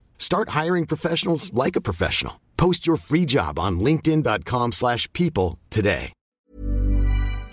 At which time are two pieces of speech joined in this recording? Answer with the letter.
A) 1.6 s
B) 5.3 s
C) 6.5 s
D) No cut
C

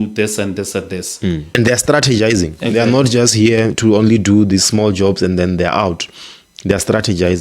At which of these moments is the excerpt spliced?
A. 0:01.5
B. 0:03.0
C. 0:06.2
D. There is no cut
A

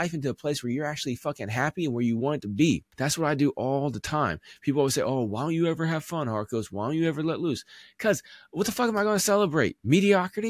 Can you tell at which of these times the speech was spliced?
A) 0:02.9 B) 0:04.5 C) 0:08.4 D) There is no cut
A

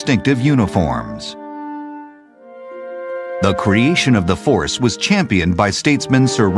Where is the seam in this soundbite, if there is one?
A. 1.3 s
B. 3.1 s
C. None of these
A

